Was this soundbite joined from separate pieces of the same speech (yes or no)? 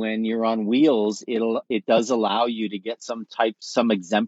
no